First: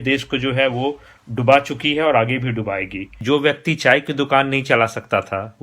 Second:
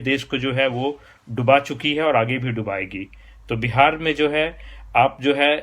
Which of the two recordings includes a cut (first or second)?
first